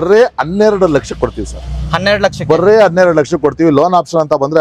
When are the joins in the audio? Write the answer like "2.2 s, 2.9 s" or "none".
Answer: none